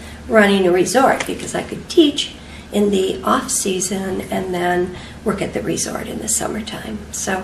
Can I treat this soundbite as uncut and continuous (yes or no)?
yes